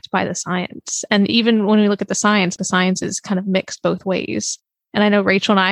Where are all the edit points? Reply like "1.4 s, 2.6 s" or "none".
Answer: 2.5 s